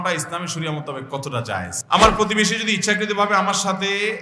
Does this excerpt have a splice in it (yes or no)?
yes